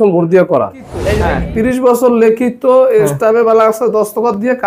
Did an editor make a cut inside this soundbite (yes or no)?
yes